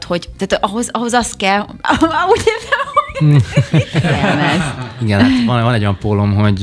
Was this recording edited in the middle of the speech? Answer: yes; 1 cut; at 4.0 s

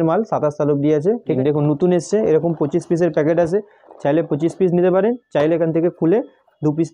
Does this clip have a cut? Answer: yes; 1 cut; at 1.3 s

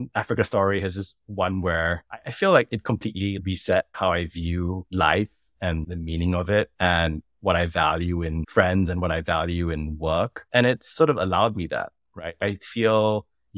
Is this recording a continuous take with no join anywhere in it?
yes; 0 cuts

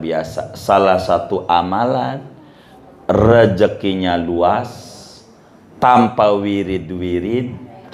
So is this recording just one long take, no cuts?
yes; 0 cuts

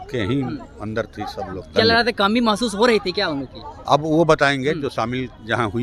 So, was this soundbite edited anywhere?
yes; 1 cut; at 1.6 s

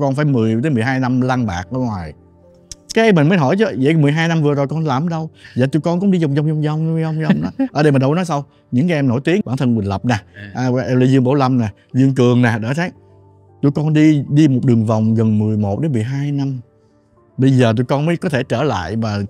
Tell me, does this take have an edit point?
no; 0 cuts

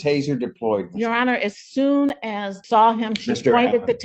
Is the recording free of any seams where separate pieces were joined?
no; 1 cut; at 2.5 s

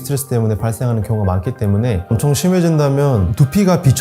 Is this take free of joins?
no; 1 cut; at 2.1 s

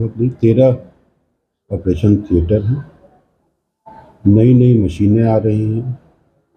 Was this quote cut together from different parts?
no; 0 cuts

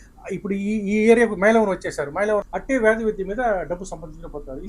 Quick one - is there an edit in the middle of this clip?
yes; 1 cut; at 2.5 s

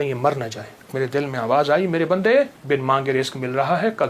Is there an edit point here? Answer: yes; 2 cuts; at 0.9 s, 2.6 s

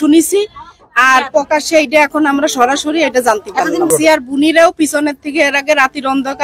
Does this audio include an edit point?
yes; 1 cut; at 3.9 s

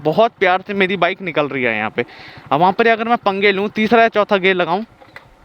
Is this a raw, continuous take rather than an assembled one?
yes; 0 cuts

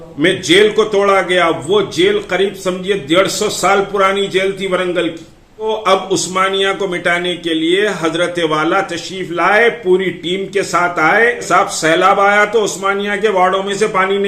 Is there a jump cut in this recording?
yes; 2 cuts; at 5.7 s, 11.5 s

